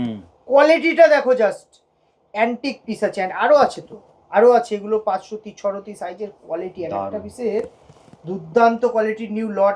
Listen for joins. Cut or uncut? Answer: uncut